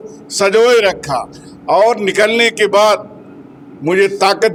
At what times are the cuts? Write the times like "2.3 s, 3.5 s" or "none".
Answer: none